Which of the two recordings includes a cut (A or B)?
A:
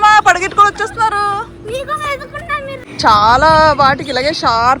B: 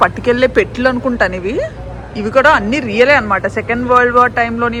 A